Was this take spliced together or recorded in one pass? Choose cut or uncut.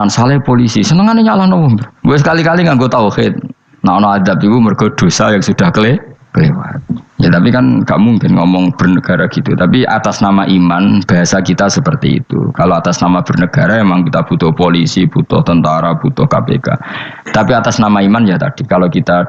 uncut